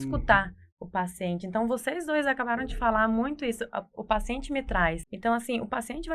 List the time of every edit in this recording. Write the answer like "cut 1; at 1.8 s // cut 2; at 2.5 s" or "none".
cut 1; at 5.1 s

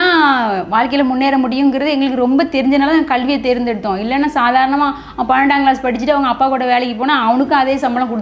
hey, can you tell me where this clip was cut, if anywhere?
none

